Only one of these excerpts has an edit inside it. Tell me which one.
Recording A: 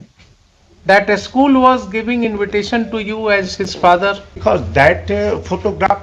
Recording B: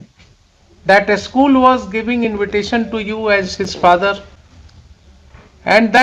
A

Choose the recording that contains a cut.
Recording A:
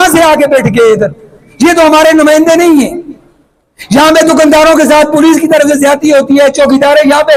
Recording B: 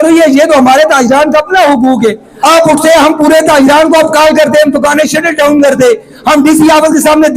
B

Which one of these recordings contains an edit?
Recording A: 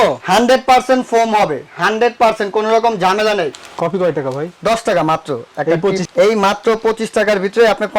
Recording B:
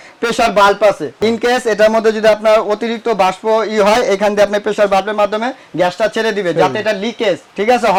A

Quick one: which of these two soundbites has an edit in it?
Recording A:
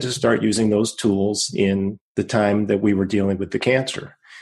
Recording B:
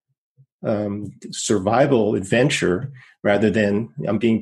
A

